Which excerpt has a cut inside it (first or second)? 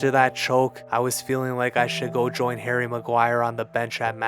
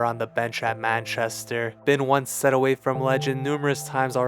second